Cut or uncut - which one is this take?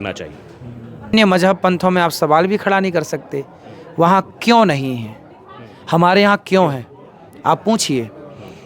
cut